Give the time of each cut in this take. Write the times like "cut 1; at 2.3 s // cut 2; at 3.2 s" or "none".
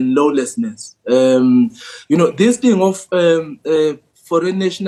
none